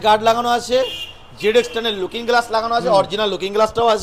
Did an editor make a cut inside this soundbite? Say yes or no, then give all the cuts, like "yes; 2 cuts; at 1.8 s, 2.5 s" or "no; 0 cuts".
no; 0 cuts